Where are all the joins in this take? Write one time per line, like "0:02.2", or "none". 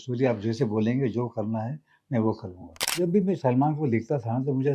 0:02.9